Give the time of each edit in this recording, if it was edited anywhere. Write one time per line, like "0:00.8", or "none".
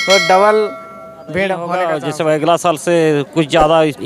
0:01.9